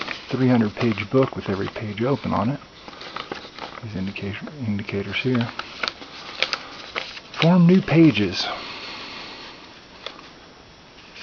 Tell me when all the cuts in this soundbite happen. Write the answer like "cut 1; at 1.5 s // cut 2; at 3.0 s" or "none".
cut 1; at 4.6 s